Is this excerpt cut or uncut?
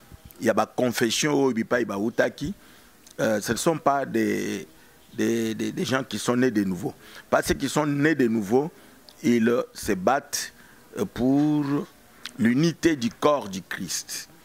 uncut